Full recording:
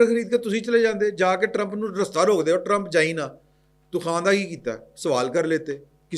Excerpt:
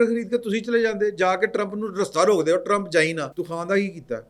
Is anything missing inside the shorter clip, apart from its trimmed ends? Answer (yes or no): yes